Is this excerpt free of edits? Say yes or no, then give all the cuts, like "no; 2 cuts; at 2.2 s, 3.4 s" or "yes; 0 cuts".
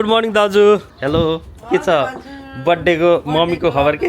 no; 1 cut; at 0.9 s